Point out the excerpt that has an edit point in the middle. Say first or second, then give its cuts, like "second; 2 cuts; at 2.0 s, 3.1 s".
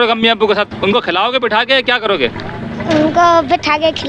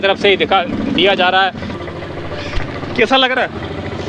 second; 1 cut; at 1.7 s